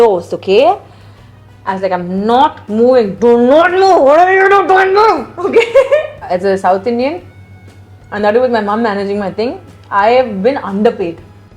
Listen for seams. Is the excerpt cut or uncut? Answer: cut